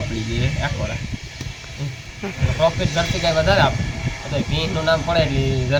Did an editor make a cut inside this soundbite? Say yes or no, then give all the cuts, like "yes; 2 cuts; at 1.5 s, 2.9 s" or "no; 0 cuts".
no; 0 cuts